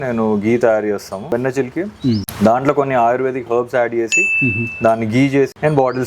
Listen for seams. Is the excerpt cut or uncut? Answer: cut